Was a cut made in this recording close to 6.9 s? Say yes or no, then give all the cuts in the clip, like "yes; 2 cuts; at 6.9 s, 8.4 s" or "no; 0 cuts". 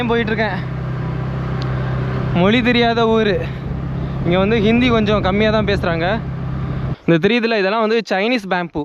yes; 1 cut; at 6.9 s